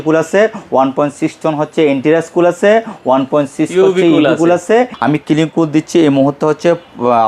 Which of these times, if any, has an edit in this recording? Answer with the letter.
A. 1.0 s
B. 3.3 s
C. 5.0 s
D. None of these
C